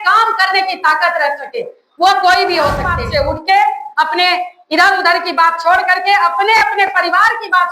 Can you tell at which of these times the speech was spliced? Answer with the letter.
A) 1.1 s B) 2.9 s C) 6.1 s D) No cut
B